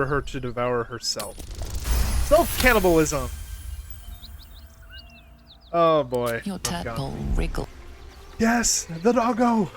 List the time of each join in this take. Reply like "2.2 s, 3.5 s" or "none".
7.7 s